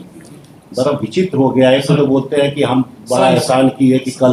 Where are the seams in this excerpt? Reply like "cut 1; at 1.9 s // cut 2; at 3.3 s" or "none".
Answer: none